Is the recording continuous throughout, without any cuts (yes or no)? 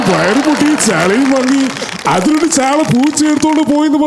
yes